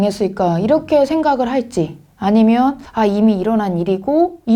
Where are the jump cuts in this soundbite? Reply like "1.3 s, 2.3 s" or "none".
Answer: none